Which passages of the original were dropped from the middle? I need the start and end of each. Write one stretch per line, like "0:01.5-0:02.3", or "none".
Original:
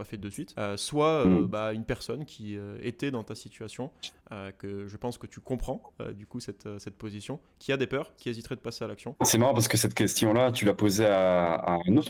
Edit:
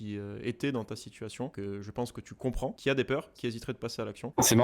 0:03.9-0:04.6
0:05.8-0:07.6